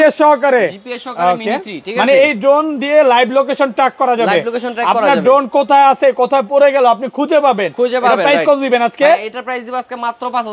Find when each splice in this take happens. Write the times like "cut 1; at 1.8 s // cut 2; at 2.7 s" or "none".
none